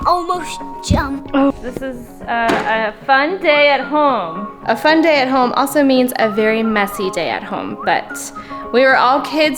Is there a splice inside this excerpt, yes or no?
yes